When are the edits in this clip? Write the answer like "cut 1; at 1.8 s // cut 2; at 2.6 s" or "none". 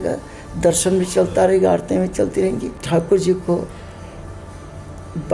cut 1; at 2.7 s